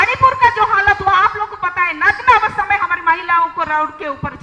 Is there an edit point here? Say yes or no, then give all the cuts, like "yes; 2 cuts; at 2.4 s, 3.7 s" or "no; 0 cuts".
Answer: no; 0 cuts